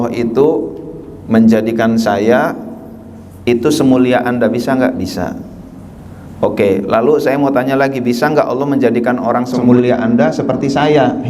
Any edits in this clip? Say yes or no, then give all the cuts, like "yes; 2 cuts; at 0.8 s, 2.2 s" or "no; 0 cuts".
yes; 1 cut; at 9.7 s